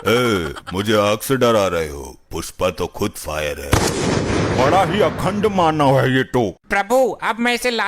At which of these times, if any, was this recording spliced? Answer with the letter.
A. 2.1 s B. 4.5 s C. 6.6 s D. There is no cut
D